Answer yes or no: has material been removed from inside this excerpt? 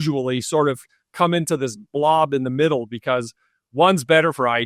no